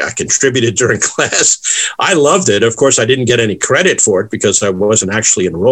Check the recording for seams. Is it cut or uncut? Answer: uncut